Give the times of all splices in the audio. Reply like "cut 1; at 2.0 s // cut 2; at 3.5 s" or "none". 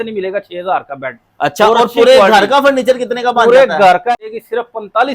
cut 1; at 4.1 s

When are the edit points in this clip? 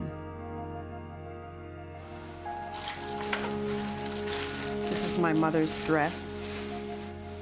cut 1; at 2.4 s

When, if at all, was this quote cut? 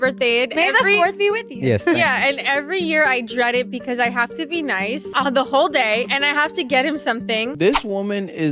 cut 1; at 5.1 s // cut 2; at 7.5 s

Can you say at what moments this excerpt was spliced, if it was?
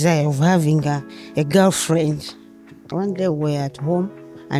cut 1; at 2.7 s

